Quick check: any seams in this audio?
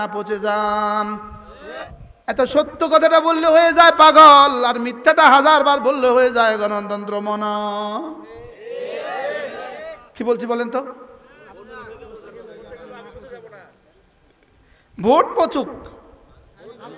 yes; 2 cuts; at 1.8 s, 9.0 s

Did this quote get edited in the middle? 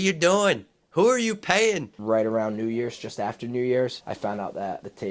yes; 1 cut; at 2.0 s

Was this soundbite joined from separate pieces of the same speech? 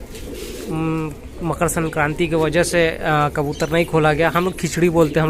no; 0 cuts

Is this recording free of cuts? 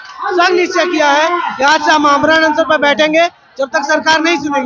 yes; 0 cuts

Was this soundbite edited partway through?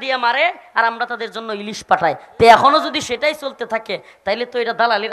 no; 0 cuts

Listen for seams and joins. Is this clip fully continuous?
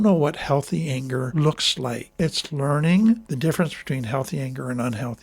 no; 3 cuts; at 1.3 s, 2.2 s, 3.3 s

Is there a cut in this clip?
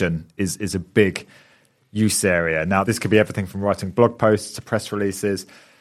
no; 0 cuts

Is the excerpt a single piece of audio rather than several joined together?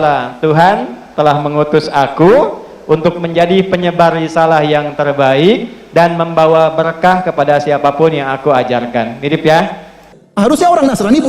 no; 1 cut; at 10.2 s

